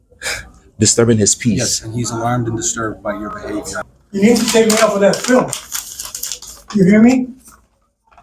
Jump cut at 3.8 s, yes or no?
yes